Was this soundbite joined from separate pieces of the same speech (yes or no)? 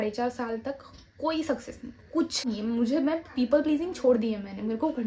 yes